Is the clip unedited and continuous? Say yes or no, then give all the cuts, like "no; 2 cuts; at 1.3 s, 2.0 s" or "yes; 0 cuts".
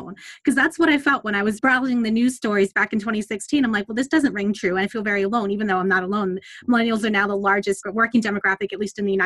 no; 2 cuts; at 1.6 s, 7.8 s